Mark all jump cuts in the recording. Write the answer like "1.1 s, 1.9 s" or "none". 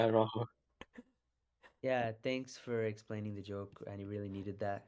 none